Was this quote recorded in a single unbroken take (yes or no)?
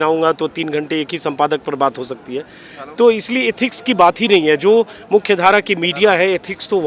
yes